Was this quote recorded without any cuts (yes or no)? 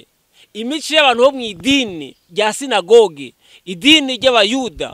yes